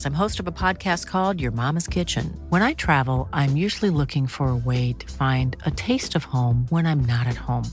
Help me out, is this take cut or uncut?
uncut